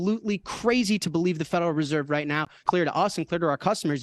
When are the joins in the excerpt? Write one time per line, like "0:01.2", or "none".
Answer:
0:02.6